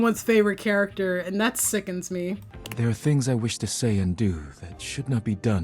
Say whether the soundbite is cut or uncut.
cut